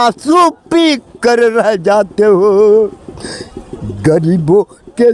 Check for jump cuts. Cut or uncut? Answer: uncut